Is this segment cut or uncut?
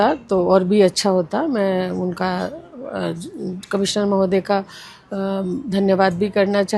uncut